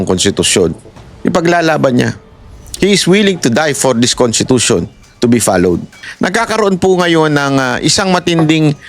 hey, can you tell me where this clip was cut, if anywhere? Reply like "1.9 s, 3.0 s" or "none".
6.0 s